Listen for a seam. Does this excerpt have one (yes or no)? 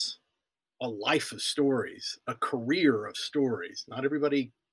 no